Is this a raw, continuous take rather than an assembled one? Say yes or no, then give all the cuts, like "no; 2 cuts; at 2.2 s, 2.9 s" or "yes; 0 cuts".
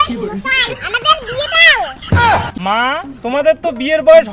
no; 1 cut; at 2.5 s